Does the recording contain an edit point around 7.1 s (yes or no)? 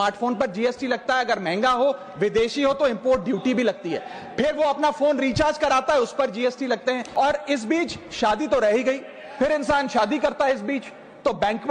yes